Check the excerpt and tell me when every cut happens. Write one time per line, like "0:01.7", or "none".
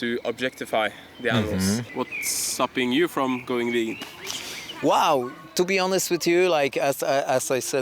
0:01.9